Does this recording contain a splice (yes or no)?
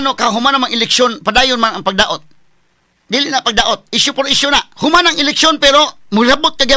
no